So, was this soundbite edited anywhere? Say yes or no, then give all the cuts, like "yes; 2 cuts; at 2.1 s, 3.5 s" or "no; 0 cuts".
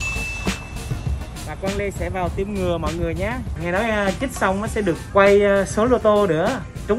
yes; 1 cut; at 3.5 s